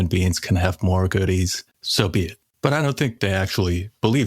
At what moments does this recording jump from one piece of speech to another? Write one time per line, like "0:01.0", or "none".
0:02.1
0:03.1